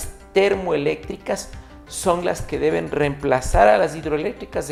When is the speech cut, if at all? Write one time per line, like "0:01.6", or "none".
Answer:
none